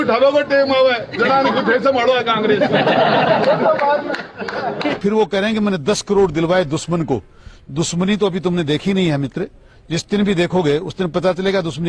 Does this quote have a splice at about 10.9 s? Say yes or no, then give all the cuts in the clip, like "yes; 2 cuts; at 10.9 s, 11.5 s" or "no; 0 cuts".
no; 1 cut; at 5.0 s